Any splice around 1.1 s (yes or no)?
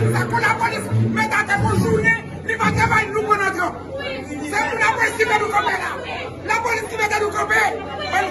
no